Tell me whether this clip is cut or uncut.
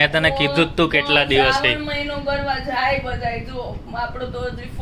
uncut